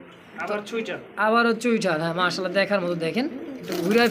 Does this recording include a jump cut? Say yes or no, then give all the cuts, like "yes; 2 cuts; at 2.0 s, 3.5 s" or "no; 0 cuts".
no; 0 cuts